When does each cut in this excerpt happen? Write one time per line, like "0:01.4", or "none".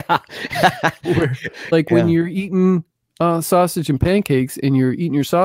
0:01.7

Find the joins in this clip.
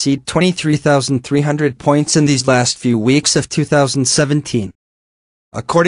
0:04.7

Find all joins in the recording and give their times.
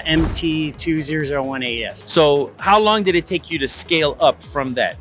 0:01.9

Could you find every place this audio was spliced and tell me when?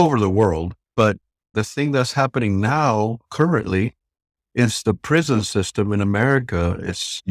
0:01.1

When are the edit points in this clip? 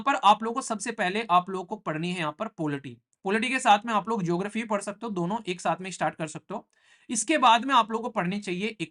none

